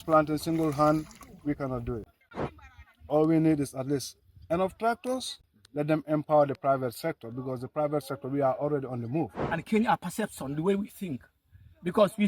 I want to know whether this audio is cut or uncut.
cut